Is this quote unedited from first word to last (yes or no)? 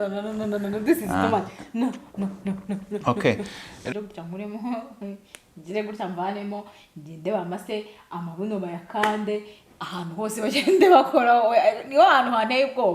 no